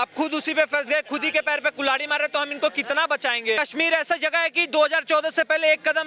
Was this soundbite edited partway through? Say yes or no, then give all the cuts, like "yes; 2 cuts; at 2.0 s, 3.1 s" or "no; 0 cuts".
yes; 1 cut; at 3.6 s